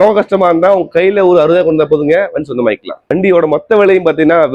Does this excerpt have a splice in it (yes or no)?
yes